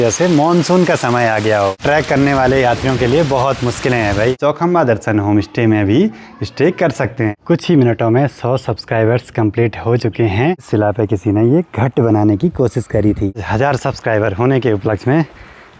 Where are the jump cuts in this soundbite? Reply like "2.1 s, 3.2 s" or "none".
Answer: 1.8 s, 4.4 s, 7.3 s, 10.6 s, 13.5 s